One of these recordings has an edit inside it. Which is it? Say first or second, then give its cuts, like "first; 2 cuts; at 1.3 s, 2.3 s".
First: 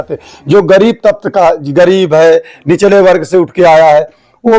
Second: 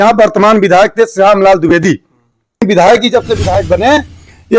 second; 1 cut; at 2.6 s